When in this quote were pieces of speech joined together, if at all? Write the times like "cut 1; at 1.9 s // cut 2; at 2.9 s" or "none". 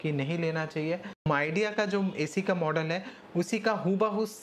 cut 1; at 1.2 s